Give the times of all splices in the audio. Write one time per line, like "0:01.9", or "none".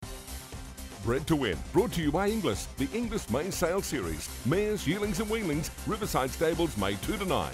0:01.0